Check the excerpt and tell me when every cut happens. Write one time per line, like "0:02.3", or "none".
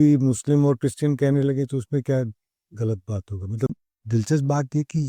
0:03.7